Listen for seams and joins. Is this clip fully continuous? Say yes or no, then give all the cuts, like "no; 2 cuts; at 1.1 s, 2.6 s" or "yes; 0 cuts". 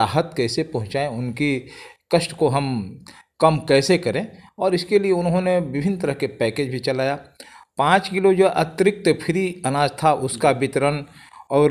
yes; 0 cuts